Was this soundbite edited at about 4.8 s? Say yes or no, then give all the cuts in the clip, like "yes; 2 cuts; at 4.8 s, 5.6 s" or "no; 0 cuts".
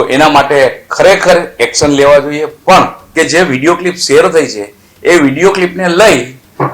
no; 1 cut; at 3.0 s